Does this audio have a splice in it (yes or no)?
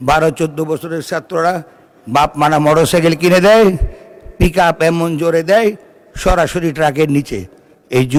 no